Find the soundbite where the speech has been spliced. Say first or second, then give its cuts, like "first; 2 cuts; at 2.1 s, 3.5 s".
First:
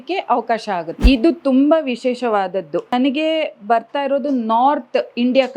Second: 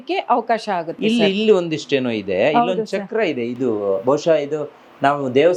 first; 2 cuts; at 1.0 s, 2.9 s